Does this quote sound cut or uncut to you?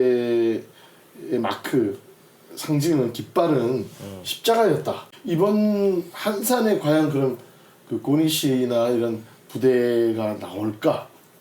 cut